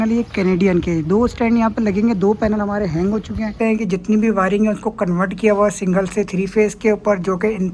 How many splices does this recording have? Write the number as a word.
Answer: one